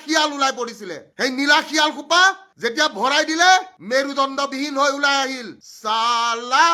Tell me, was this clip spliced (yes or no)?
no